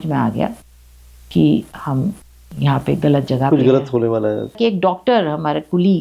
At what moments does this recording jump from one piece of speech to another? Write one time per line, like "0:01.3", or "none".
0:04.6

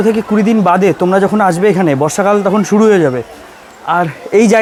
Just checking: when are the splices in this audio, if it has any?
none

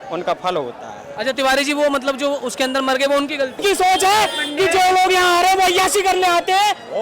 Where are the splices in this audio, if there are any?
0:03.6

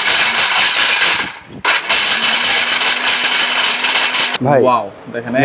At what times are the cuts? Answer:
0:04.3

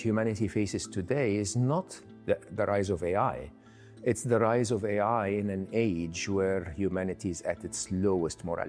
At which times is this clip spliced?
none

